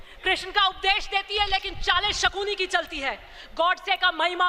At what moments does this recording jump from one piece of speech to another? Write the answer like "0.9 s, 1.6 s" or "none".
none